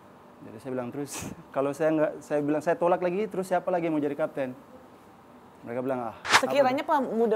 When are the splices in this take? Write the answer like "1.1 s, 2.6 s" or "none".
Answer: 6.2 s